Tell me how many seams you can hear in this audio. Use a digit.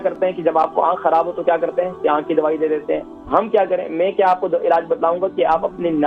0